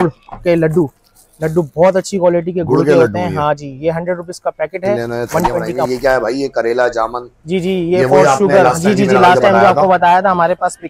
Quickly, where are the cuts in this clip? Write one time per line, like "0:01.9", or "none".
0:05.9